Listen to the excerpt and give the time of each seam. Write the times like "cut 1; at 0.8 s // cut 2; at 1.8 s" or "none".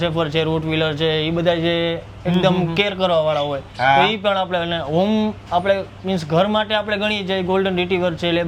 none

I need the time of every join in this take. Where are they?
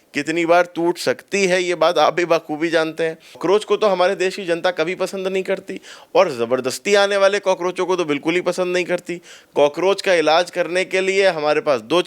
cut 1; at 3.4 s

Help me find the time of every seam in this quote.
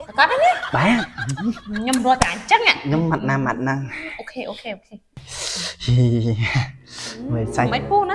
cut 1; at 5.2 s

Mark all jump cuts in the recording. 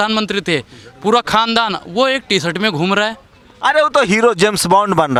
none

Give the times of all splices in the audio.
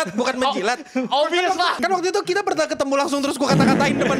cut 1; at 1.8 s

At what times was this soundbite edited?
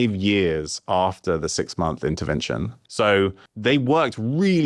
cut 1; at 2.8 s // cut 2; at 3.5 s

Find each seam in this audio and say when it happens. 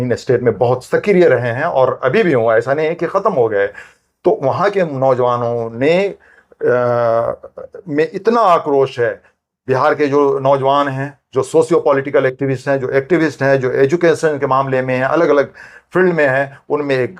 none

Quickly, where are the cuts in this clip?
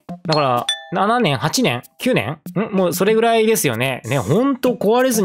none

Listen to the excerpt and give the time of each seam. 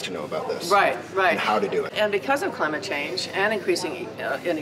cut 1; at 1.9 s

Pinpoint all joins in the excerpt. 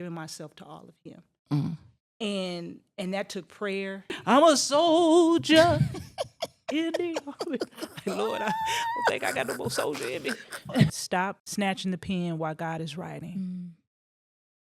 cut 1; at 4.1 s // cut 2; at 10.9 s

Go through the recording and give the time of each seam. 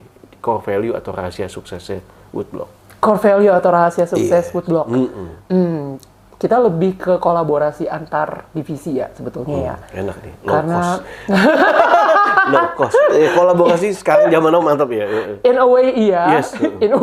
none

